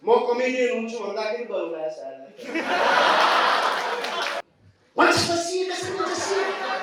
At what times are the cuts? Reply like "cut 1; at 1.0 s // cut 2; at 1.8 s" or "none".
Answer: cut 1; at 4.4 s